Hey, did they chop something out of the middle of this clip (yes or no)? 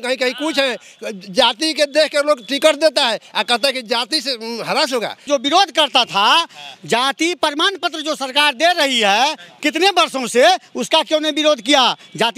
yes